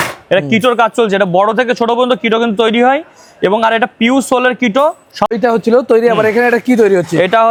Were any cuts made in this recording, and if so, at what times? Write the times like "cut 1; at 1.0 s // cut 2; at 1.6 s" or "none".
none